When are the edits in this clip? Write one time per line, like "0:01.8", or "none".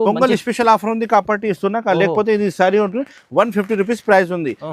none